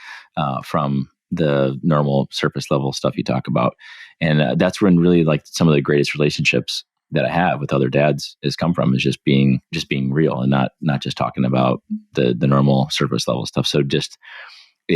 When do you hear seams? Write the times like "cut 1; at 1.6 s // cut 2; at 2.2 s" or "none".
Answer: cut 1; at 9.7 s